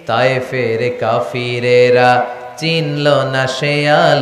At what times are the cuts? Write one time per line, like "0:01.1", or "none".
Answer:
none

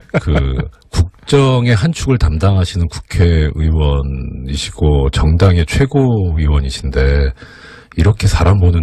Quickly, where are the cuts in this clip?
none

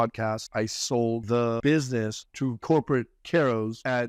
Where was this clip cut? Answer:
0:01.0

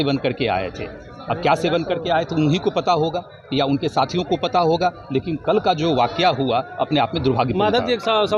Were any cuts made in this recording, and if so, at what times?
none

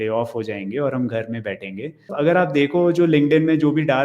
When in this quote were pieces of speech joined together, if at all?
0:02.1

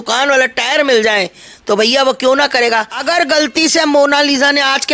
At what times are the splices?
0:02.9

